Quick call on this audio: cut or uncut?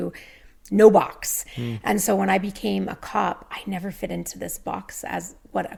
uncut